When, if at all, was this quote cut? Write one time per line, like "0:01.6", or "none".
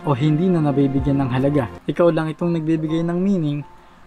0:01.7